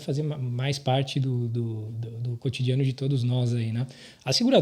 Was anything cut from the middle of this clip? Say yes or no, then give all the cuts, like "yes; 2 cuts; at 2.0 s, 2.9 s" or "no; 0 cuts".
no; 0 cuts